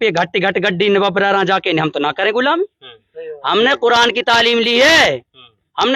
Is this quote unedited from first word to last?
yes; 0 cuts

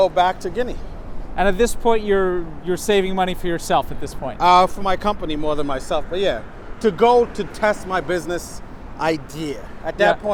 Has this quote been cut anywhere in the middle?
no; 0 cuts

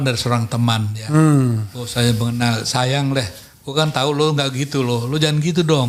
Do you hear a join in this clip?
no; 0 cuts

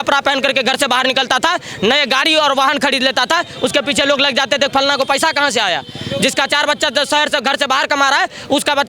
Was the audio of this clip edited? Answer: no; 0 cuts

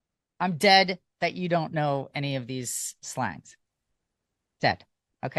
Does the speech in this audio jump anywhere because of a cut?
no; 0 cuts

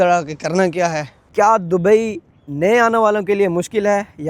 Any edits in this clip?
yes; 1 cut; at 1.2 s

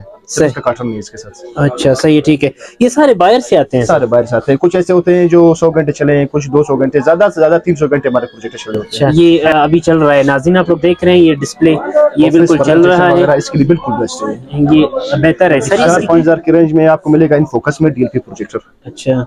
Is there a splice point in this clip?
yes; 2 cuts; at 9.1 s, 15.8 s

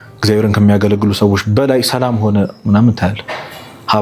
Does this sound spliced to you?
no; 0 cuts

